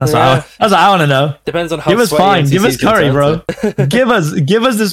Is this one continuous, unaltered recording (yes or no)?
yes